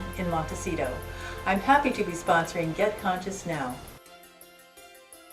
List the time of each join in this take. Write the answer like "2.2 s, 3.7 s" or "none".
3.9 s